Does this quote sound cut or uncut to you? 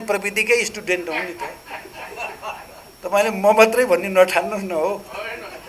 uncut